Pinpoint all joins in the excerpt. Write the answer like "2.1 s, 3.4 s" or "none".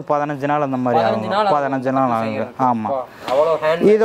none